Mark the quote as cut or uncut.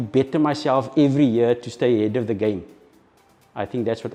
uncut